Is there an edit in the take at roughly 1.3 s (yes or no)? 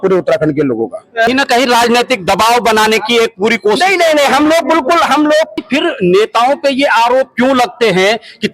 yes